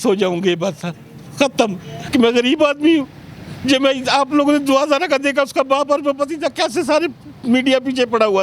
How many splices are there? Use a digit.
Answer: 1